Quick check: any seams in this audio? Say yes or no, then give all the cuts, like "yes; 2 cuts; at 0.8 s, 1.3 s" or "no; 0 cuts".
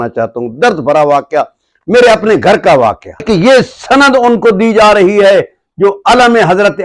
yes; 1 cut; at 3.2 s